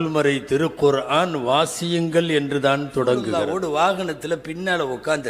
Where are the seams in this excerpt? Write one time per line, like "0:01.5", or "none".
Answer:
0:03.4